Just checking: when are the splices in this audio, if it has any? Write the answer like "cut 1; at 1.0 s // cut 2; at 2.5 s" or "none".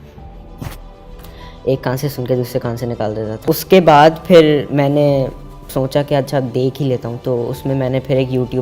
cut 1; at 3.4 s